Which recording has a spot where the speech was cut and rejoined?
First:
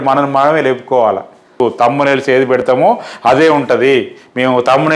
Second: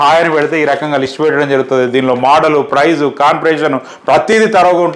first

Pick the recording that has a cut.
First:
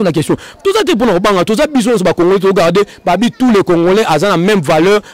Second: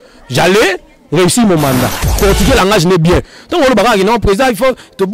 second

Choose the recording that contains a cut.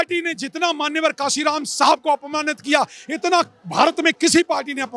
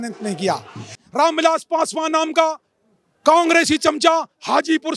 second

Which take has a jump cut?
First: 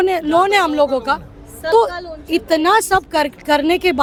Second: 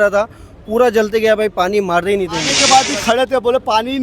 second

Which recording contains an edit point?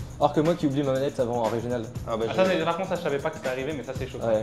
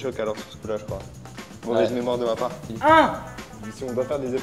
second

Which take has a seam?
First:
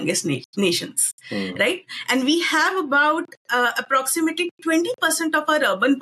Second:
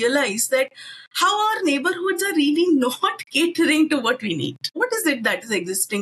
second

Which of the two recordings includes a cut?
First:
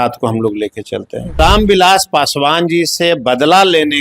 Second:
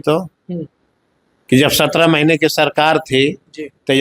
first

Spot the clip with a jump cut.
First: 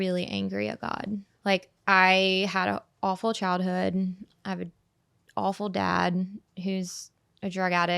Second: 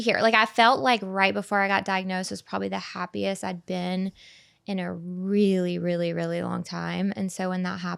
first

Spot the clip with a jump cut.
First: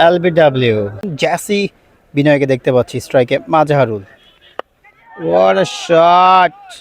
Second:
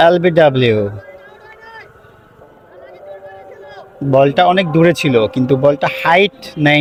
first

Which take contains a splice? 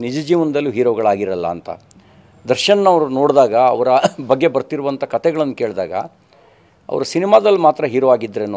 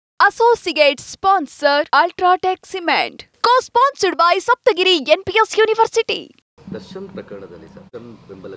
second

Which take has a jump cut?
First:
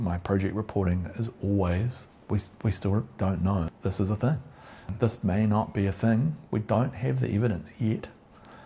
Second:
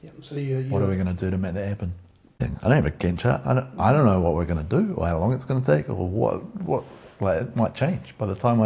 second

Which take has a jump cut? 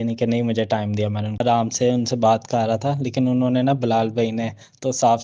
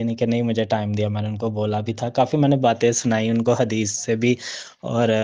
first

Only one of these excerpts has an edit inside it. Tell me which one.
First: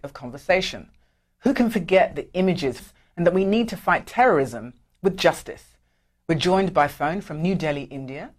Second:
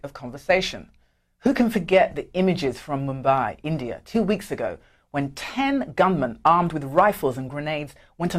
second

